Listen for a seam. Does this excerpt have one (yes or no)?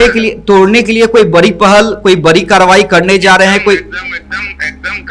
no